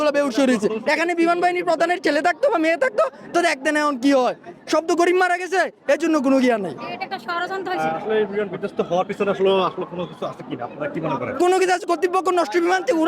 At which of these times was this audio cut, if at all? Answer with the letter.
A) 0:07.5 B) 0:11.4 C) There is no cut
B